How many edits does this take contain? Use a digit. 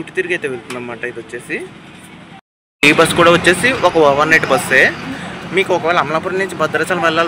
1